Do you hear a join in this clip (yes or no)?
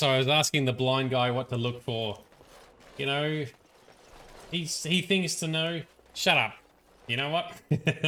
no